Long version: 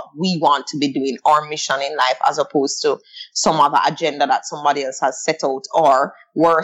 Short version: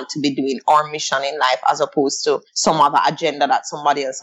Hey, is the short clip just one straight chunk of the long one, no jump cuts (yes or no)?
no